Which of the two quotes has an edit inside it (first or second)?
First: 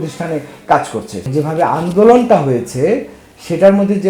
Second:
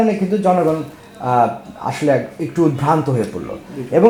first